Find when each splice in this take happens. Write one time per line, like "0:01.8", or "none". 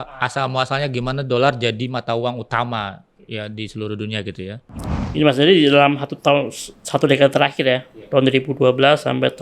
0:04.6